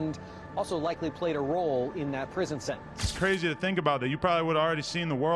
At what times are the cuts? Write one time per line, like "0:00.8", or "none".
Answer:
0:03.1